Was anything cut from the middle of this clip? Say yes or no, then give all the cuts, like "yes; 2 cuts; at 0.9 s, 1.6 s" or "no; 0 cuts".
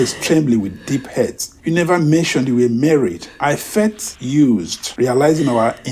yes; 3 cuts; at 1.5 s, 3.3 s, 4.1 s